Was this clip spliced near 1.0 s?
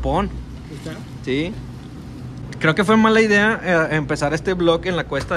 no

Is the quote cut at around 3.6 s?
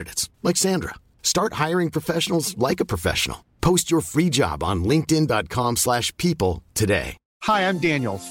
no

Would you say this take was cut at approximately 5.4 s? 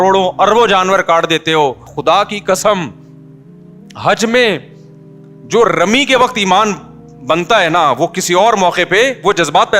no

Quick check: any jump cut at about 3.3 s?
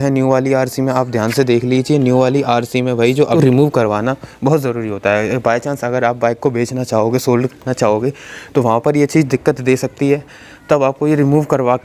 yes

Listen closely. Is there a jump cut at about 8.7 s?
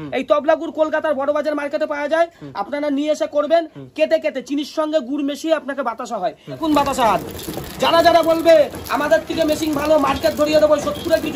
no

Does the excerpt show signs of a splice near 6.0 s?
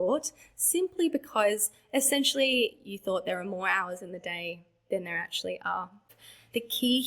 yes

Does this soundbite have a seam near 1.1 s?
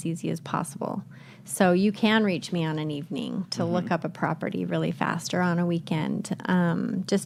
no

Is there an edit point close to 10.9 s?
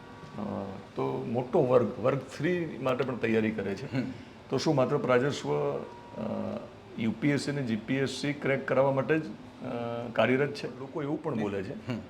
yes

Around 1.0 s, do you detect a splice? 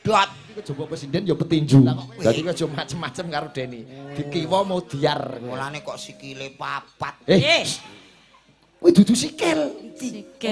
yes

